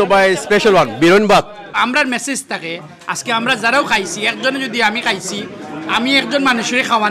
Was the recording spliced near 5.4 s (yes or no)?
no